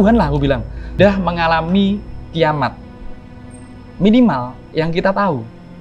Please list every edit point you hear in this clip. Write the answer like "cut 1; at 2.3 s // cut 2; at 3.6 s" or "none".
cut 1; at 0.9 s

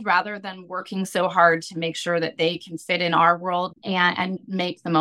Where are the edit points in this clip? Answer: cut 1; at 4.1 s

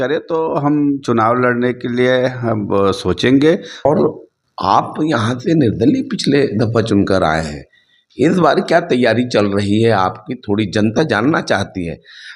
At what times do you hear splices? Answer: cut 1; at 3.9 s

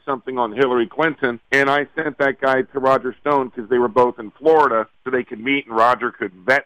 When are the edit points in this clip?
cut 1; at 1.4 s // cut 2; at 5.0 s

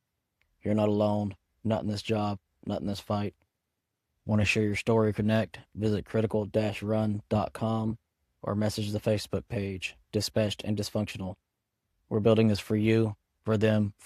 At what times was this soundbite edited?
none

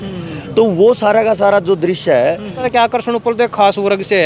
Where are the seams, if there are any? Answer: cut 1; at 2.6 s

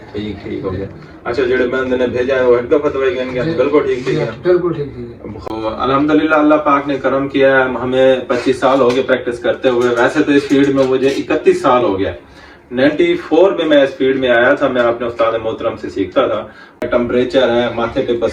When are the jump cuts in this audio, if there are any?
cut 1; at 5.4 s // cut 2; at 16.8 s

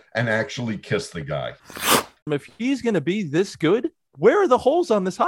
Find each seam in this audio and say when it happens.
cut 1; at 2.1 s // cut 2; at 4.0 s

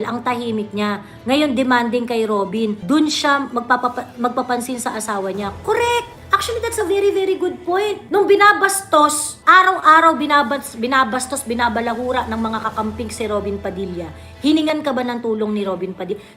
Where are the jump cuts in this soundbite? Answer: none

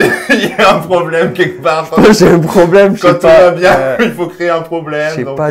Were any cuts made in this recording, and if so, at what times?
none

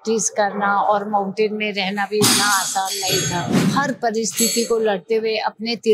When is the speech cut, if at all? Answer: cut 1; at 3.5 s

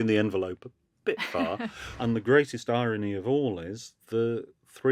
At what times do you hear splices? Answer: cut 1; at 1.8 s

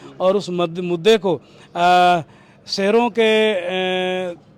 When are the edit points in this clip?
none

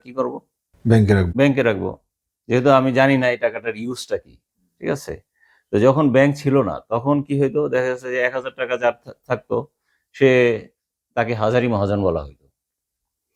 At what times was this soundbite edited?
none

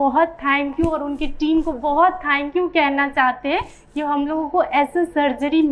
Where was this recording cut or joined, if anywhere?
none

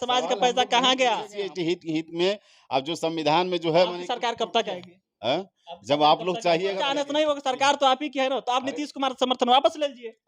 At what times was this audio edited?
cut 1; at 1.3 s // cut 2; at 6.8 s

